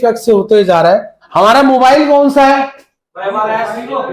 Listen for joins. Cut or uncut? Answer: cut